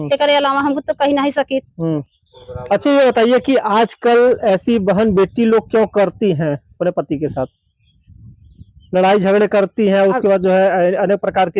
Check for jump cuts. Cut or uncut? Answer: uncut